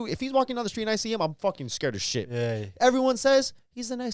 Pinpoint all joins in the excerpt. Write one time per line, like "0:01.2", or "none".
none